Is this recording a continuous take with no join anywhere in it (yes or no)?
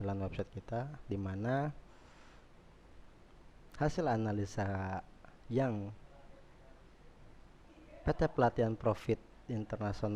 yes